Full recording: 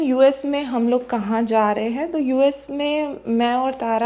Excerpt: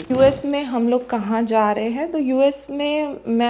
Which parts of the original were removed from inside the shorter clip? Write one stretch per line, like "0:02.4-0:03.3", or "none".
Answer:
none